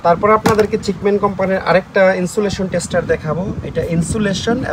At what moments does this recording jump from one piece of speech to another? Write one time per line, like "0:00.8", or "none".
none